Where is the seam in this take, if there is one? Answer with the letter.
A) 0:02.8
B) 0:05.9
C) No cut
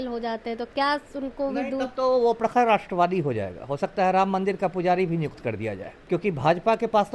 B